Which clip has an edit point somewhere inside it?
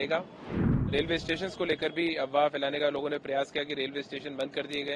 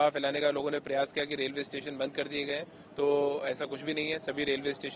first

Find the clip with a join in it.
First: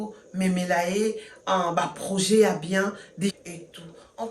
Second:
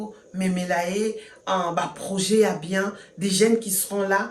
first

